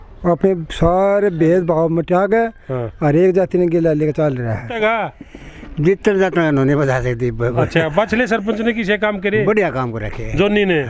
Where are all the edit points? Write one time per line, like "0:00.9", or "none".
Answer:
0:04.8